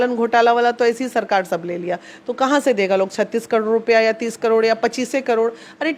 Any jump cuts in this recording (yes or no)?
no